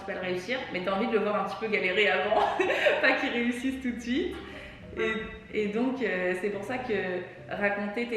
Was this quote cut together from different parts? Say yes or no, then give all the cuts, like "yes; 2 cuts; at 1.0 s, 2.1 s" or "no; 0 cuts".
no; 0 cuts